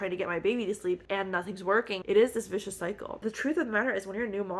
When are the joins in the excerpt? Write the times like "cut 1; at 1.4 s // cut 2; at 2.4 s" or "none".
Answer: cut 1; at 2.0 s // cut 2; at 3.2 s